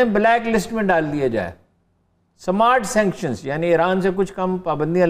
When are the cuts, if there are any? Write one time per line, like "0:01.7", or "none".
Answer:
none